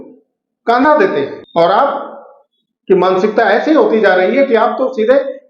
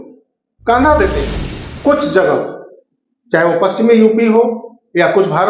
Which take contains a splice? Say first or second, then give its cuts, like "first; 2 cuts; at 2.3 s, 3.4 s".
second; 1 cut; at 1.4 s